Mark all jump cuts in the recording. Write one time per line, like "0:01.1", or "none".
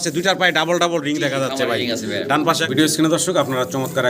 0:02.6